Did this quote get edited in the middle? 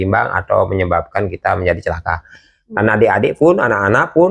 no; 0 cuts

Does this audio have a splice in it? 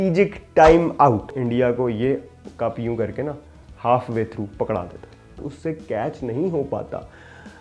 yes; 2 cuts; at 1.4 s, 5.4 s

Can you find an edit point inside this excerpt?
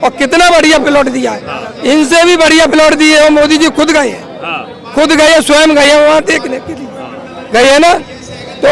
no; 0 cuts

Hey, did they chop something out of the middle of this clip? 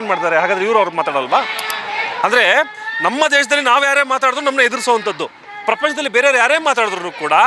no; 0 cuts

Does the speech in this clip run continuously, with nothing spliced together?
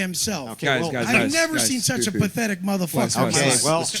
yes; 0 cuts

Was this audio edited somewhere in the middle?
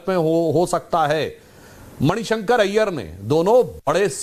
no; 0 cuts

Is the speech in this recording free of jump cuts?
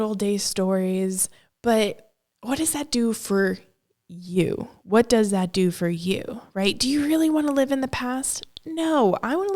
yes; 0 cuts

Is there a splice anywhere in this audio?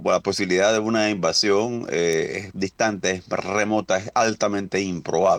no; 0 cuts

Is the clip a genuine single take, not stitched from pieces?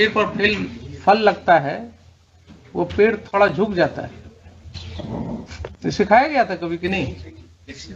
no; 1 cut; at 5.7 s

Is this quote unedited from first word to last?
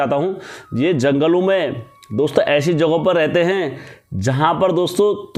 yes; 0 cuts

